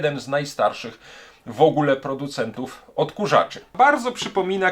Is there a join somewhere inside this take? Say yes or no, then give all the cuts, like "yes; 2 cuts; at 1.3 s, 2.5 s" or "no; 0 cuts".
yes; 1 cut; at 3.7 s